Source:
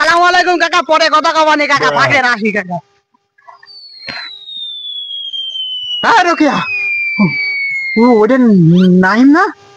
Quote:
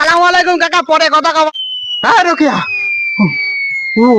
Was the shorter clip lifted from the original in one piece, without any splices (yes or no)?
no